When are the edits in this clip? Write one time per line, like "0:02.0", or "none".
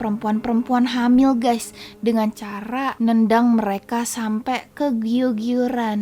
none